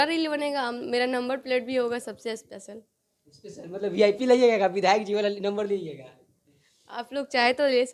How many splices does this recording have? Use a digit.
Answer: 0